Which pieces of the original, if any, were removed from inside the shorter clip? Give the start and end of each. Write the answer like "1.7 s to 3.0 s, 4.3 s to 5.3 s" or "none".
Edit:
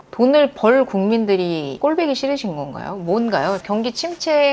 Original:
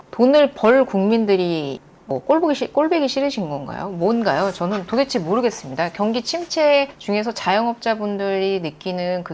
1.7 s to 2.7 s, 4.6 s to 5.9 s